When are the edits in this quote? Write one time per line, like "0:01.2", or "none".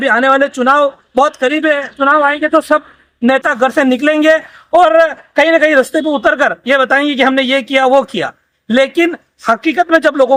none